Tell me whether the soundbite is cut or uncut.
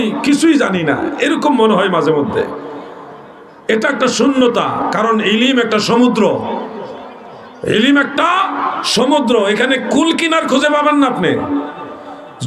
uncut